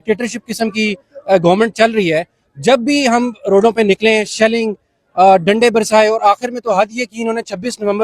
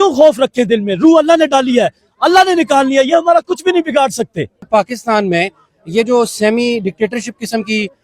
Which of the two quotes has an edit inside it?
second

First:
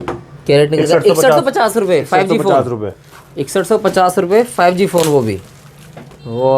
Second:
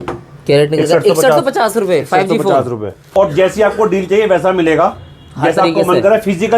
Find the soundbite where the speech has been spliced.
second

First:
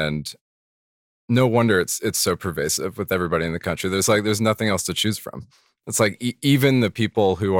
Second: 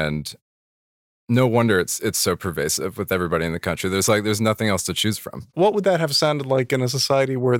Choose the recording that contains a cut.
second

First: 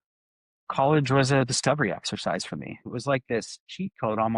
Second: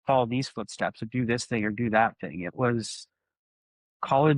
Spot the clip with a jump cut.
first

